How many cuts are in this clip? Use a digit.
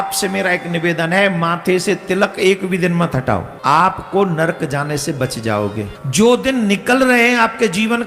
2